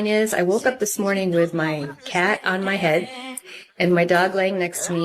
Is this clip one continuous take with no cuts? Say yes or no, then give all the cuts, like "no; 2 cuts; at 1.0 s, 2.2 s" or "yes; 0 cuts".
yes; 0 cuts